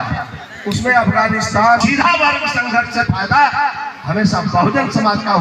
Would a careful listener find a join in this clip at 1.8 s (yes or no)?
yes